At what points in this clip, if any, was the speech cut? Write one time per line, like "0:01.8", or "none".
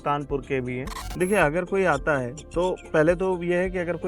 0:01.0